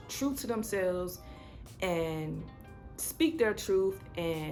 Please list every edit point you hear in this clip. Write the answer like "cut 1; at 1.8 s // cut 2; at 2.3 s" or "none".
none